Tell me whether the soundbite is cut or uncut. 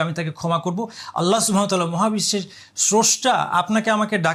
uncut